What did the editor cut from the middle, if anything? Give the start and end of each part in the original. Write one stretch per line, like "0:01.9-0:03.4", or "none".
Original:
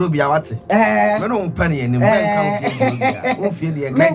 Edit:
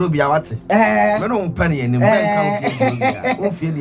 none